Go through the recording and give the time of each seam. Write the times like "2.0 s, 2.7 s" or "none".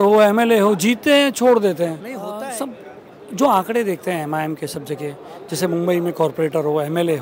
2.3 s

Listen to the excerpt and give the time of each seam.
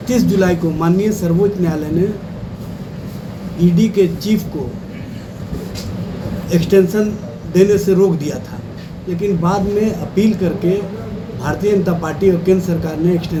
none

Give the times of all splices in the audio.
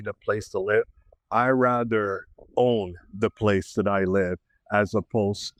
none

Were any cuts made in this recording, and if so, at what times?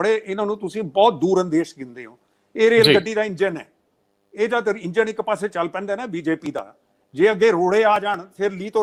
none

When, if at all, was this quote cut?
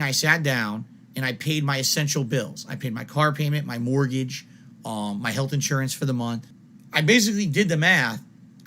6.5 s

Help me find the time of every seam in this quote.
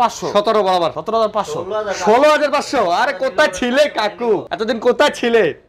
1.0 s, 4.5 s

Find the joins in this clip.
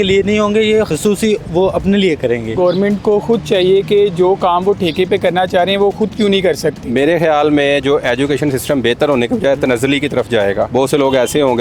0.9 s, 2.6 s, 6.9 s, 10.7 s

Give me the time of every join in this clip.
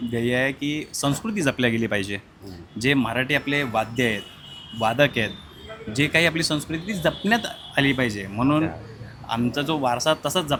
none

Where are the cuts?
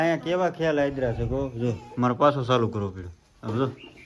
none

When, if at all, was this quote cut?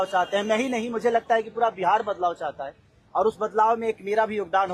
none

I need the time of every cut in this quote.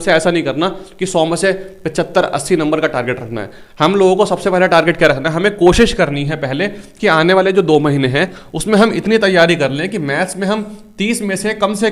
none

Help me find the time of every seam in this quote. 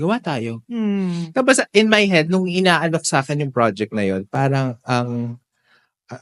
none

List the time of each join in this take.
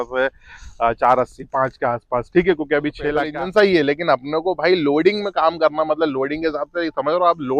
3.2 s

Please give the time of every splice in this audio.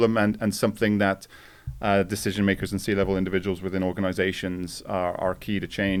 none

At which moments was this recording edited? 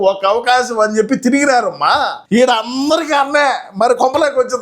2.2 s

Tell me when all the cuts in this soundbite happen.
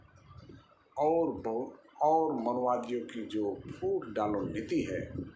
none

